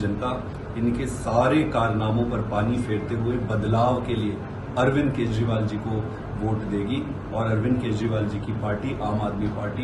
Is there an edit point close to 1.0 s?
no; 0 cuts

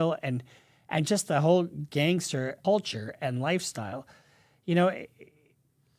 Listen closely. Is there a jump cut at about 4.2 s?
no; 1 cut; at 2.6 s

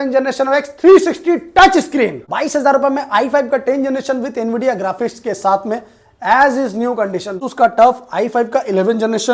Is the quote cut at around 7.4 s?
yes; 2 cuts; at 2.2 s, 7.4 s

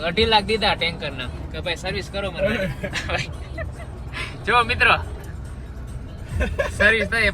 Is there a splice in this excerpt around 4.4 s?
no; 1 cut; at 1.4 s

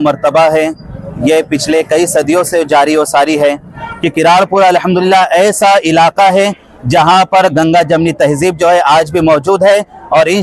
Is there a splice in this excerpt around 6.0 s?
no; 1 cut; at 3.8 s

